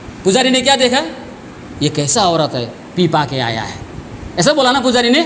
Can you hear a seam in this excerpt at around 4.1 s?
no; 0 cuts

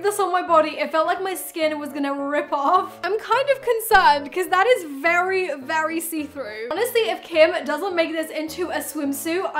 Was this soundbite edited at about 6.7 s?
yes; 2 cuts; at 2.9 s, 6.7 s

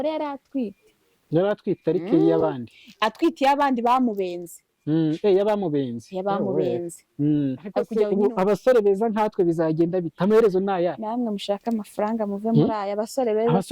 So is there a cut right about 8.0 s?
yes; 1 cut; at 8.0 s

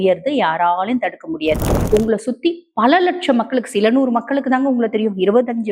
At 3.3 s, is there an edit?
no; 1 cut; at 1.7 s

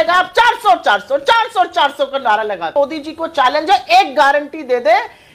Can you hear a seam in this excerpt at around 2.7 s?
yes; 1 cut; at 2.7 s

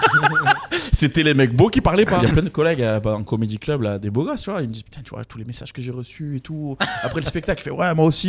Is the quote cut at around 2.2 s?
yes; 1 cut; at 2.2 s

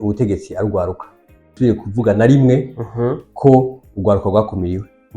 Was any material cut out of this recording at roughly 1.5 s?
yes; 1 cut; at 1.5 s

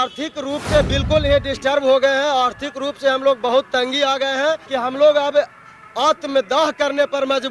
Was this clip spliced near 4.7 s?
yes; 2 cuts; at 1.0 s, 4.7 s

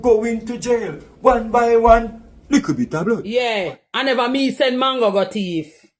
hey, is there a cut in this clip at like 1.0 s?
no; 1 cut; at 3.2 s

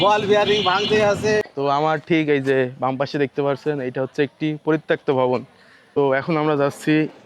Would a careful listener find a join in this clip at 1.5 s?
yes; 2 cuts; at 1.5 s, 5.8 s

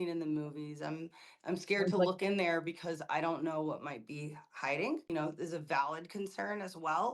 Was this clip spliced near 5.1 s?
yes; 1 cut; at 5.1 s

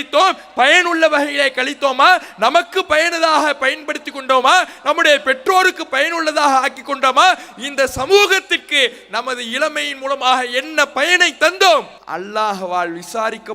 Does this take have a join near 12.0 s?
yes; 1 cut; at 12.0 s

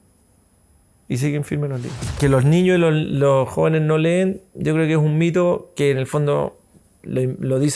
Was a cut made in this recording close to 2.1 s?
yes; 1 cut; at 2.1 s

